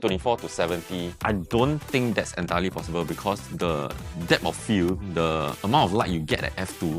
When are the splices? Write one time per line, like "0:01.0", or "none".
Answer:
0:01.1

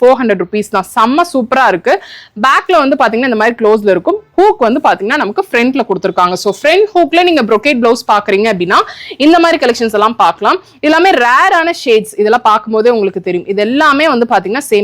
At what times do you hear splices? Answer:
none

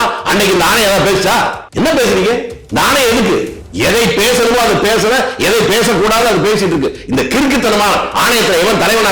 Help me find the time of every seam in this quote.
0:01.6
0:02.6
0:03.6

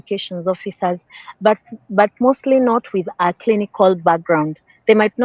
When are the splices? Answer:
none

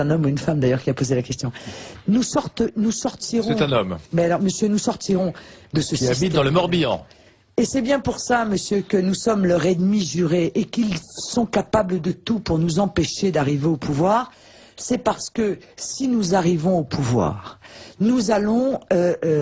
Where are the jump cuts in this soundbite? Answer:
none

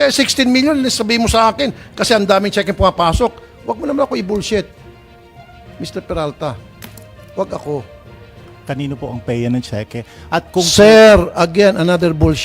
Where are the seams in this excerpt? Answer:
0:08.5

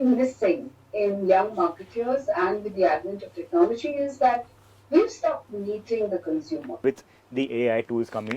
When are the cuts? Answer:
0:06.8

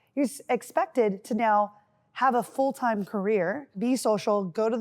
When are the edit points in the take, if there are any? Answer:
0:03.7

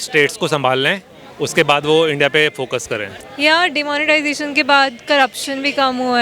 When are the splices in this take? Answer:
0:03.2

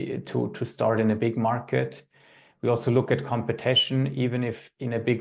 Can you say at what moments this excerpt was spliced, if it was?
none

